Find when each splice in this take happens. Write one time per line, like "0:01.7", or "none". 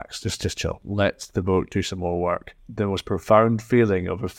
0:00.8
0:02.6